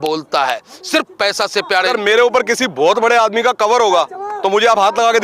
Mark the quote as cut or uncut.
cut